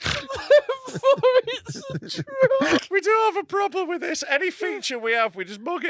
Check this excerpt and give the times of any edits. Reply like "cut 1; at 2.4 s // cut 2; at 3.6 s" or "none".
cut 1; at 2.8 s